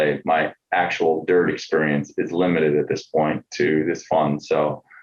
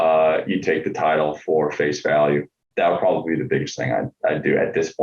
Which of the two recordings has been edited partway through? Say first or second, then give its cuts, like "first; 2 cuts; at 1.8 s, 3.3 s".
second; 1 cut; at 2.6 s